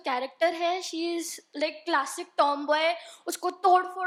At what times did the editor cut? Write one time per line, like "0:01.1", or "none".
none